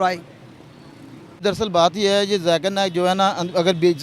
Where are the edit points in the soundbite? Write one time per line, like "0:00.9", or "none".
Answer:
0:01.4